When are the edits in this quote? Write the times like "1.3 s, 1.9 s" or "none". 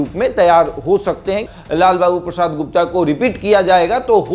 1.5 s